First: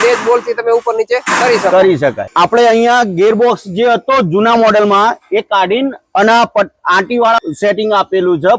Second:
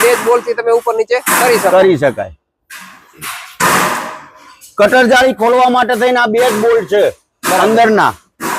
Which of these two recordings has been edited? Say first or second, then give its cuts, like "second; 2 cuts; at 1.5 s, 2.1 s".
first; 2 cuts; at 2.2 s, 7.6 s